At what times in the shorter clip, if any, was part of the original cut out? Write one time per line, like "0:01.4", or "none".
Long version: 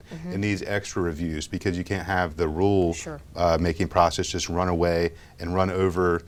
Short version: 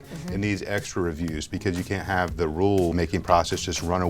0:02.9